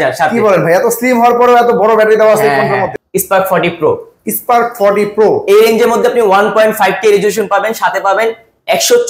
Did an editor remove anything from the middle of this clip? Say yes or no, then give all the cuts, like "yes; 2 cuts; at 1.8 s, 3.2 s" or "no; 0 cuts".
yes; 1 cut; at 3.0 s